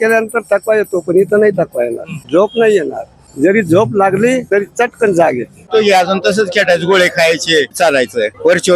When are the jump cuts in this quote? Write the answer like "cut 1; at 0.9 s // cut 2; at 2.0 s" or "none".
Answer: none